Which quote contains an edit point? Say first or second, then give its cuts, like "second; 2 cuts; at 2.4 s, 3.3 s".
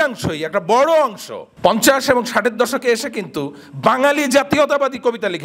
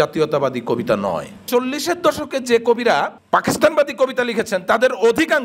second; 2 cuts; at 1.4 s, 3.2 s